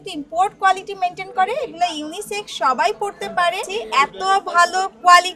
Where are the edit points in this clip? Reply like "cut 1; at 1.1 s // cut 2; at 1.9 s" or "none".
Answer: cut 1; at 3.7 s